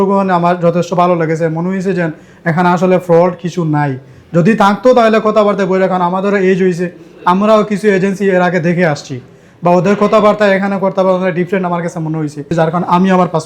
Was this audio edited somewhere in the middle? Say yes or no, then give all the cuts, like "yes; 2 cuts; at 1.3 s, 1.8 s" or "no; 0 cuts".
yes; 1 cut; at 12.5 s